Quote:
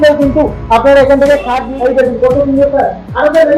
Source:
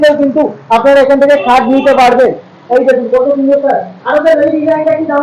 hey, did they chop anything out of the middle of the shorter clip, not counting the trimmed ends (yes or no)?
yes